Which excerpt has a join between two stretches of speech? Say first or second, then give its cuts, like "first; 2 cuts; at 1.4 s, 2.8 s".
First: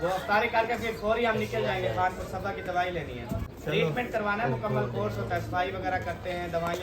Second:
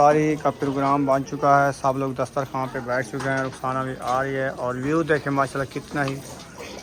first; 1 cut; at 3.5 s